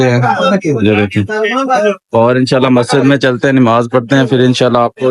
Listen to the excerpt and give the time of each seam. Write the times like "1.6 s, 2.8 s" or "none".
none